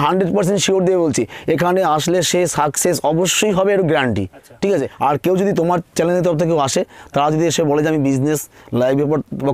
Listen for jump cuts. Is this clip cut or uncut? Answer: cut